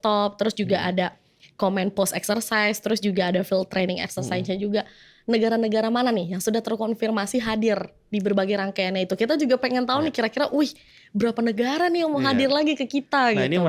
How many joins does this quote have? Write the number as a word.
zero